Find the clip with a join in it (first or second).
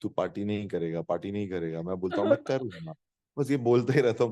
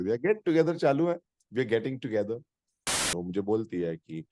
second